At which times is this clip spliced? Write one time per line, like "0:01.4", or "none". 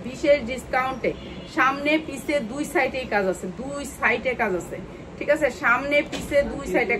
none

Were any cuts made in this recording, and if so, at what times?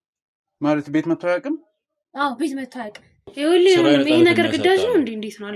0:03.3

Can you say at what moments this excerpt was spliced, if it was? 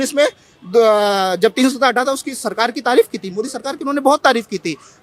none

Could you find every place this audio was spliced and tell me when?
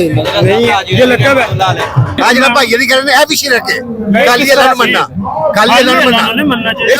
0:02.2

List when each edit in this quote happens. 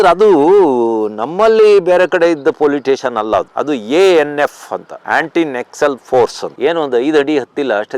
0:06.5

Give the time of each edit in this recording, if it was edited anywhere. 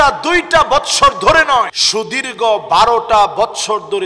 0:01.8

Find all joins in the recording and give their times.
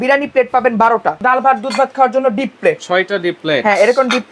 0:01.2

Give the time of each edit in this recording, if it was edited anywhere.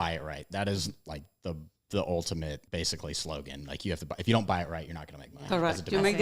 0:01.7
0:02.6

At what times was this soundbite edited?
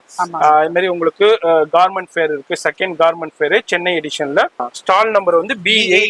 0:04.7

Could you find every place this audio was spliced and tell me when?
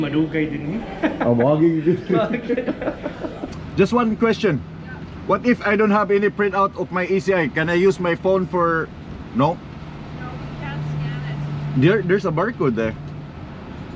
0:03.5

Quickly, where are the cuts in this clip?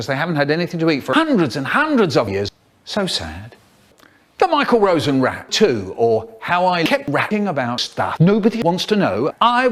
none

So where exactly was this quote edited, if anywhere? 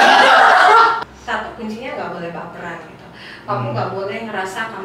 0:01.0

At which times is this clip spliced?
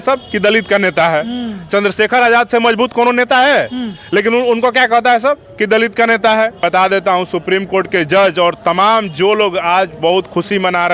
0:06.6

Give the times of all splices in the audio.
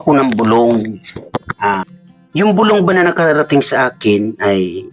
0:02.0

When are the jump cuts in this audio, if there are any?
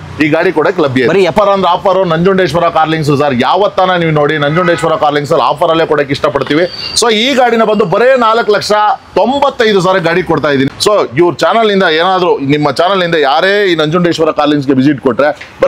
0:01.3
0:10.7

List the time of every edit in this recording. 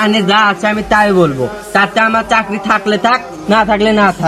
none

